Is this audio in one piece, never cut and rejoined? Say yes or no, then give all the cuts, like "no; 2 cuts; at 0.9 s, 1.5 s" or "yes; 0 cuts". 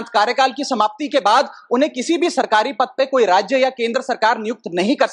yes; 0 cuts